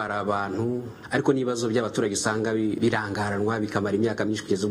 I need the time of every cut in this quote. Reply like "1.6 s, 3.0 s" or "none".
1.0 s, 2.8 s